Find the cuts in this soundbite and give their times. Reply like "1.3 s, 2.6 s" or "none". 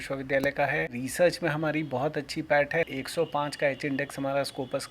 1.0 s, 2.9 s